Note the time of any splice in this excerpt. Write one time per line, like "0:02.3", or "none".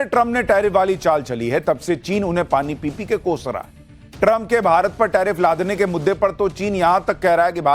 0:02.8